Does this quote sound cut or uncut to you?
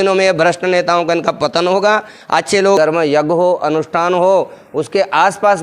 cut